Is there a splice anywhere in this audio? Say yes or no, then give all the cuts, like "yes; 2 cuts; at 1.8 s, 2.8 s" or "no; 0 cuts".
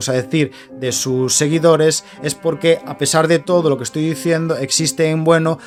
no; 0 cuts